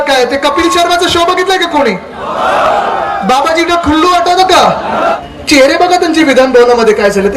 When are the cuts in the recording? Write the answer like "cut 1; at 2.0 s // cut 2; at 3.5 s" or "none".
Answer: cut 1; at 5.1 s